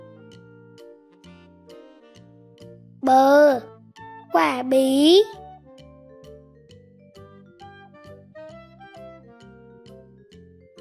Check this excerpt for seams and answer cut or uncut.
uncut